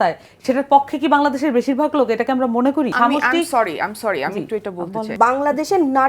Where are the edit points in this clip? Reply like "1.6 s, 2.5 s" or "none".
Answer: 2.9 s, 5.1 s